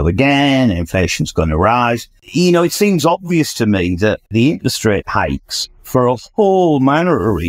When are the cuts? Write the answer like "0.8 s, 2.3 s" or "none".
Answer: 2.1 s, 4.3 s